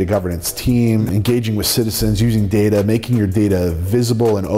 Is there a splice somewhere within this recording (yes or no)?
yes